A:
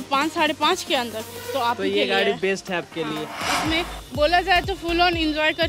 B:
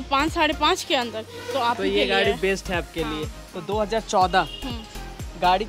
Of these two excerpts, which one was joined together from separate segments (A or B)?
A